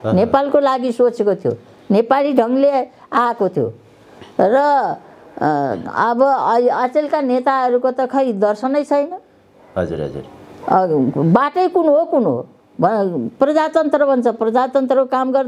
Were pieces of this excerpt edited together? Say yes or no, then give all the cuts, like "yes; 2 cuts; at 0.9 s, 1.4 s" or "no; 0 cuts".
no; 0 cuts